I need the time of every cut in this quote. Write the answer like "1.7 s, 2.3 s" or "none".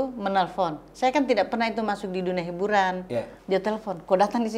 3.3 s